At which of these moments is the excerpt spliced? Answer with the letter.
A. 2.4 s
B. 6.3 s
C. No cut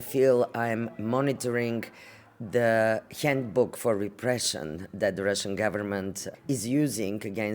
B